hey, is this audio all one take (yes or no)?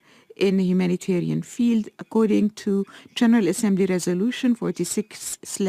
no